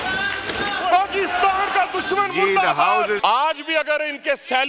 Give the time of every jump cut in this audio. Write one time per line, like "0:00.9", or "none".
0:03.2

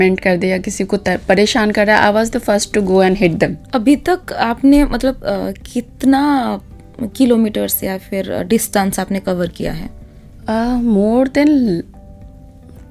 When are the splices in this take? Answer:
0:03.6

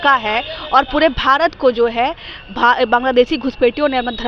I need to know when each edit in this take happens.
none

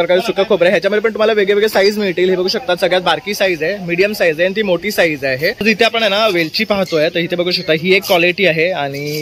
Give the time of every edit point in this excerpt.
0:05.6

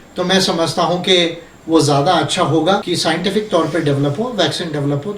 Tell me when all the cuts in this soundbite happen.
0:02.8

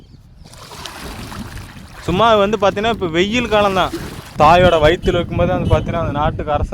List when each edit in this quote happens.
0:04.2

